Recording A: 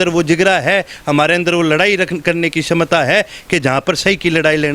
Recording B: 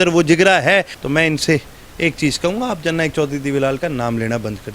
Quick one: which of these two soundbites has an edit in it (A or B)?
B